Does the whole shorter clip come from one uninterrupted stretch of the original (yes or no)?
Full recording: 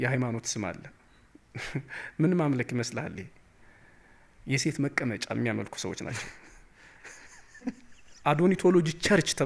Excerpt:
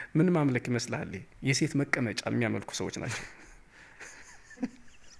no